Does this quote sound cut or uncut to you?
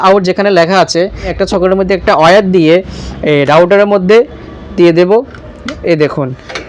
cut